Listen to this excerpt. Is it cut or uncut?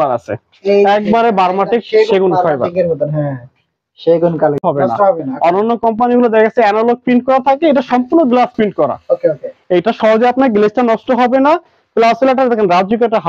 cut